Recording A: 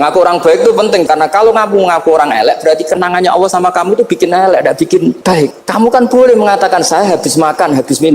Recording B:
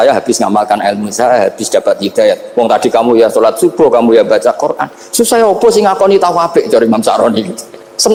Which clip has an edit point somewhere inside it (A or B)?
A